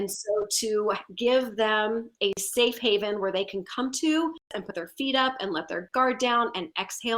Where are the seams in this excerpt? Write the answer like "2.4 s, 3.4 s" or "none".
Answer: 4.5 s